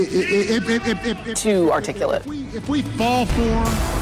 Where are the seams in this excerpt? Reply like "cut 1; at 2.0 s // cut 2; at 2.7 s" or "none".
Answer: none

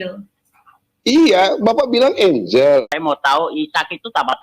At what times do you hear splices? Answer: cut 1; at 2.8 s

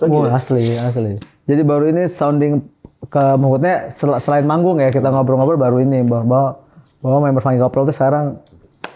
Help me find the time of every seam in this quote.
cut 1; at 1.2 s

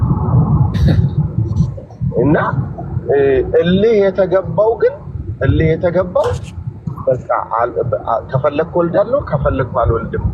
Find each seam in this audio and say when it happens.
none

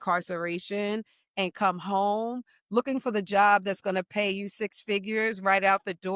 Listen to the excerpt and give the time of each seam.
none

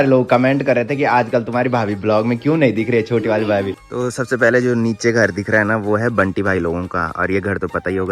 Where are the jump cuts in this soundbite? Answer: cut 1; at 3.8 s

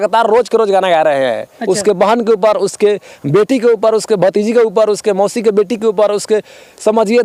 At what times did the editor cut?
none

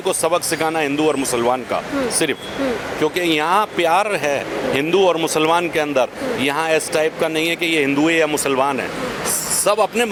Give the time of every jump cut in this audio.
none

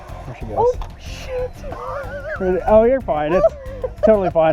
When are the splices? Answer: none

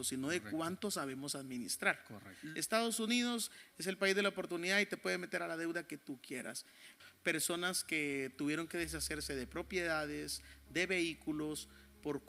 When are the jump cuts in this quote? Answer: cut 1; at 2.3 s // cut 2; at 6.9 s

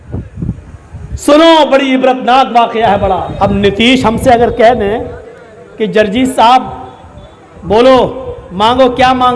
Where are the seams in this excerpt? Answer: cut 1; at 3.3 s

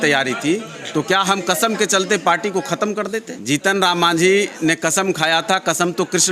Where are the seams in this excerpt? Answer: cut 1; at 3.3 s

